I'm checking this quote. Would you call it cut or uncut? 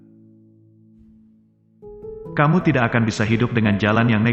uncut